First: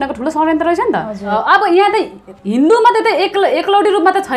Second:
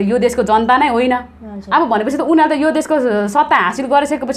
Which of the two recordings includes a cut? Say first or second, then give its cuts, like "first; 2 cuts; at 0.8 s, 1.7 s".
first; 1 cut; at 1.3 s